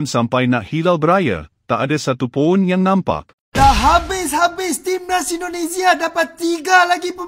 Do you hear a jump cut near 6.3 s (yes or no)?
no